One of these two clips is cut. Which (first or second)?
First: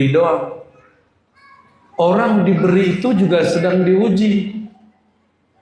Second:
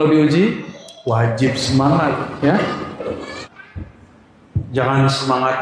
second